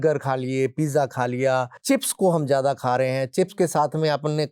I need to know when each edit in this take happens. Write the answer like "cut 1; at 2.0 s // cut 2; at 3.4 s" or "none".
cut 1; at 1.7 s